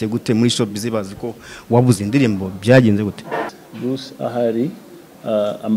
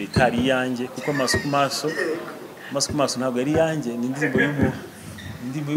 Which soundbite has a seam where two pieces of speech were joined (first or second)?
first